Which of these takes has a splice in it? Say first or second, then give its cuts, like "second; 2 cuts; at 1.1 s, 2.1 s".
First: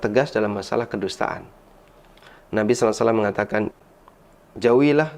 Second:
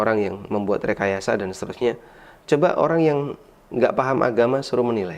first; 1 cut; at 3.8 s